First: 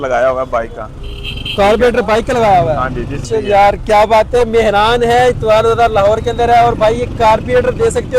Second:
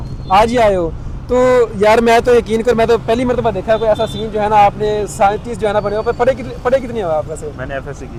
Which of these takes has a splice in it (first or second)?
first